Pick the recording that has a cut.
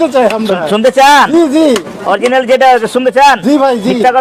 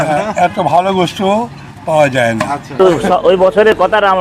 second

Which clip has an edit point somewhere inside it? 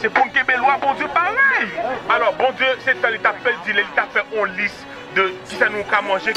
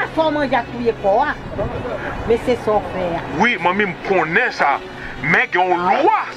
first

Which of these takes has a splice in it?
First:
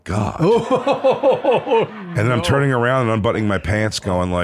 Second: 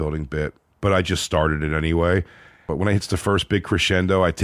second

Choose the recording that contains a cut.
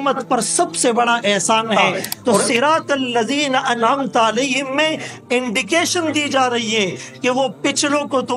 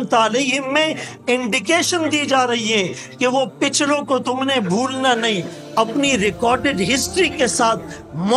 first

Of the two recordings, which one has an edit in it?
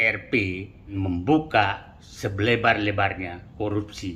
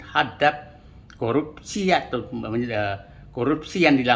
first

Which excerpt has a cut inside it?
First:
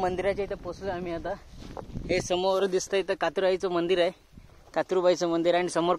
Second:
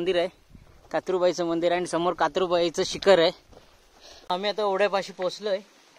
second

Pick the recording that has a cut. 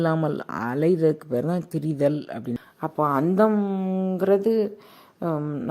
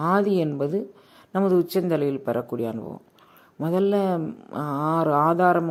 first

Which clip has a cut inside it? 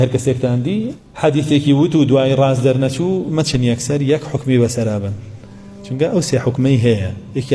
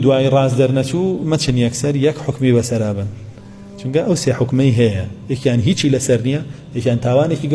first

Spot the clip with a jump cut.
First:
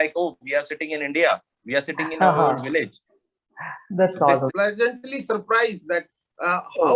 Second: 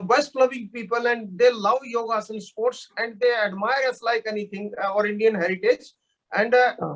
first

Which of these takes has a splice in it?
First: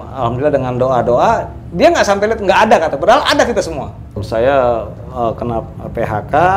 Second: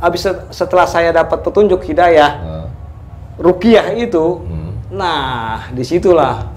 first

